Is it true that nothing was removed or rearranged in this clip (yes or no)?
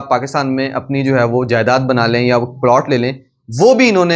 yes